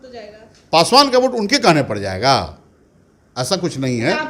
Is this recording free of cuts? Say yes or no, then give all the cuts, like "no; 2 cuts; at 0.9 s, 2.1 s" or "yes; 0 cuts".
yes; 0 cuts